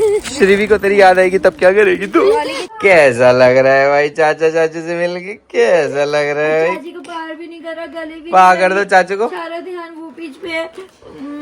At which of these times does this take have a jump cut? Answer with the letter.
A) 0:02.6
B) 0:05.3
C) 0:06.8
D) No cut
A